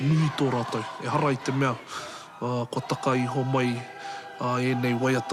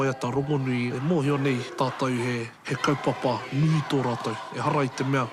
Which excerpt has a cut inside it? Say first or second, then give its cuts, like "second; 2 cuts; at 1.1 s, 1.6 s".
second; 3 cuts; at 0.9 s, 1.7 s, 2.6 s